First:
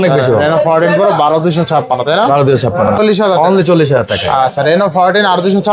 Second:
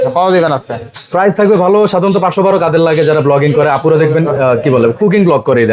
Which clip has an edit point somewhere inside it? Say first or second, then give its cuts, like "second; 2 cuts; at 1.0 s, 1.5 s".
first; 1 cut; at 2.9 s